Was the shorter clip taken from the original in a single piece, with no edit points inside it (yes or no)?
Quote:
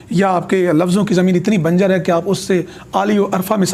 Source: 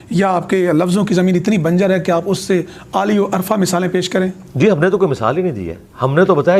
yes